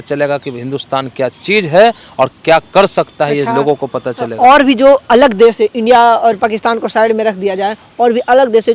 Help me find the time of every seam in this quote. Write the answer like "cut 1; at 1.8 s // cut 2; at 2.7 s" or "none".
none